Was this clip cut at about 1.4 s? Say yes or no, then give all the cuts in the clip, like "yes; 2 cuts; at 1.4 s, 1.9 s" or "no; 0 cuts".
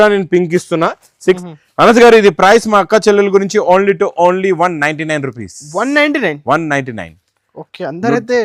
yes; 1 cut; at 1.4 s